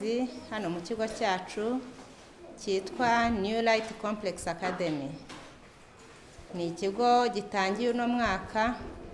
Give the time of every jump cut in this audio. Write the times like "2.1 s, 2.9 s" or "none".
none